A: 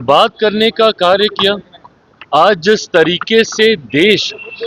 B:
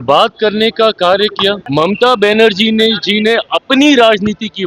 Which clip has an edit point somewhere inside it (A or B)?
B